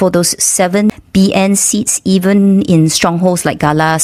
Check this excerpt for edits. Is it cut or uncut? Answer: uncut